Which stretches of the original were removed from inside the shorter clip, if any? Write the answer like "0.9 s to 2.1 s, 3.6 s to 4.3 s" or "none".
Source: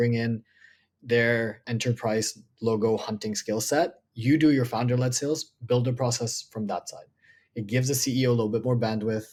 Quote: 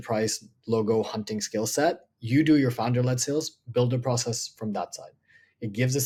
none

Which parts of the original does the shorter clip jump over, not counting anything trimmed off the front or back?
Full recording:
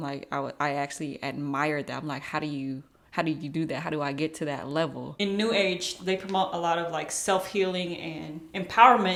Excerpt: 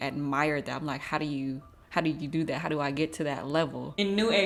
none

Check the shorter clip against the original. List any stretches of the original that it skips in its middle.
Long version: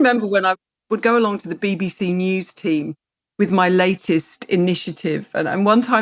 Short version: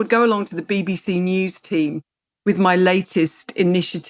none

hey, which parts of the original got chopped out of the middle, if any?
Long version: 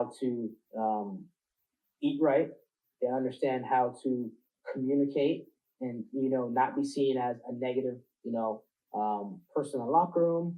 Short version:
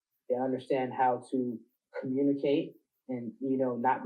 none

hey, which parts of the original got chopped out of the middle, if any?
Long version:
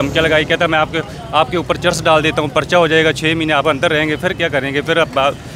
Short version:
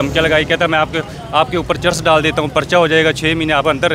none

